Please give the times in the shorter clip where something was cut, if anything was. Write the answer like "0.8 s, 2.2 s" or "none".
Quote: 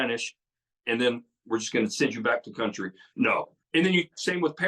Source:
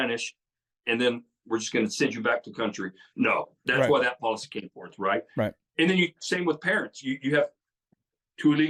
3.6 s